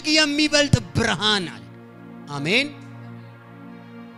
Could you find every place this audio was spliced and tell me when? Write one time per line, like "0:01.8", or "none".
none

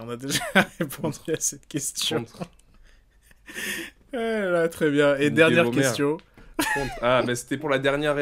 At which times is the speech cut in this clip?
none

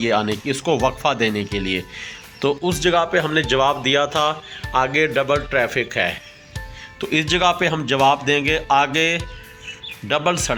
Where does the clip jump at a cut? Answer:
none

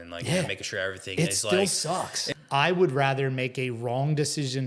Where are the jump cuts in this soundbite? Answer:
0:02.2

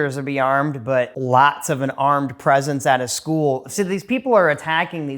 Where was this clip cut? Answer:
0:01.1

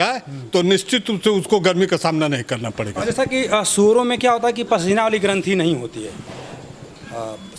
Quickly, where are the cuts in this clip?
none

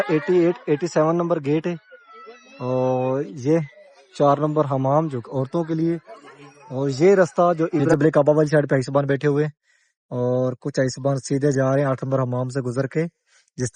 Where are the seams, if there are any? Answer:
0:07.8

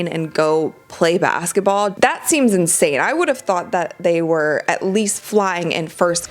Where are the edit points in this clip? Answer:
0:01.9
0:05.1

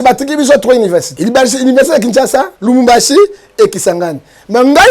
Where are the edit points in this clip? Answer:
0:01.1
0:02.5

